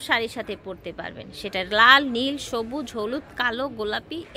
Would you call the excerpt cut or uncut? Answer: uncut